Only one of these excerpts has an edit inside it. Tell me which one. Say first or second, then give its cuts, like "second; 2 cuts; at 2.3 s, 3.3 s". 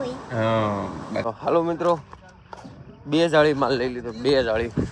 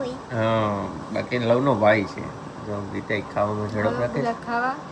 first; 1 cut; at 1.2 s